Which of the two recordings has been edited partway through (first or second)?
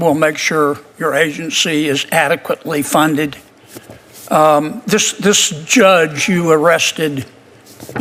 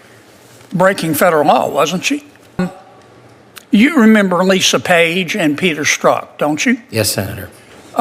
second